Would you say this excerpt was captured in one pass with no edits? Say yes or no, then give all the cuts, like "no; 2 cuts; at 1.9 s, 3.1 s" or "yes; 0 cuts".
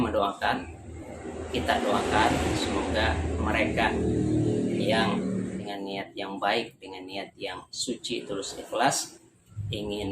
no; 1 cut; at 5.6 s